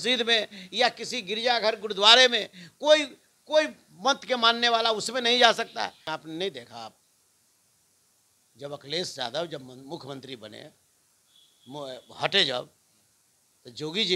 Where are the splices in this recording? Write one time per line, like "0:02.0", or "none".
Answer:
0:06.1